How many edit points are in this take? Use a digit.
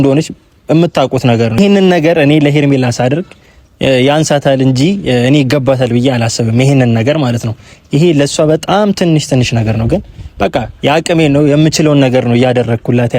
1